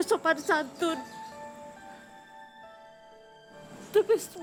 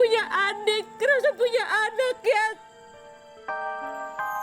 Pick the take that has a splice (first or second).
second